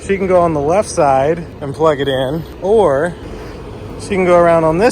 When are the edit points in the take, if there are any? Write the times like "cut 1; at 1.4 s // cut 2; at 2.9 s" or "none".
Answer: cut 1; at 2.5 s